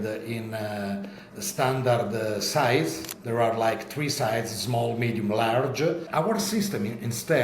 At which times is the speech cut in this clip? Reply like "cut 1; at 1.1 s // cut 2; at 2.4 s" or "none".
cut 1; at 6.1 s